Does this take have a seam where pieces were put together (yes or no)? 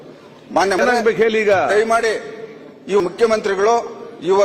yes